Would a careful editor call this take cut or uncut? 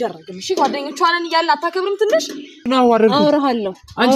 cut